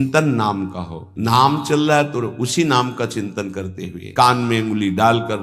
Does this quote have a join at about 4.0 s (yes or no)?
yes